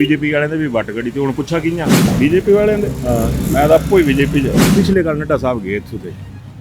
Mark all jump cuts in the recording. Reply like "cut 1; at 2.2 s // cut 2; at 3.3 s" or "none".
cut 1; at 2.1 s // cut 2; at 4.7 s